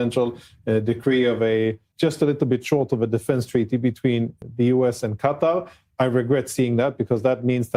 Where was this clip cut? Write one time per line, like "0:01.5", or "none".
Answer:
0:01.9
0:04.3